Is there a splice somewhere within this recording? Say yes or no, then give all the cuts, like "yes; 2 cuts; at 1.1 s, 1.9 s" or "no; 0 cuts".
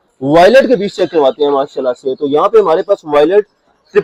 no; 0 cuts